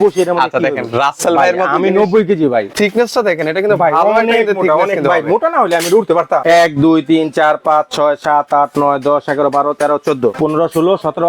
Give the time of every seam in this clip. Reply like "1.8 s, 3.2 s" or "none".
2.7 s, 6.4 s, 10.4 s